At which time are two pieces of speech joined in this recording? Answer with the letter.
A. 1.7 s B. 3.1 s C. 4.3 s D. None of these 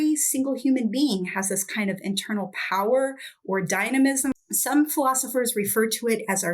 C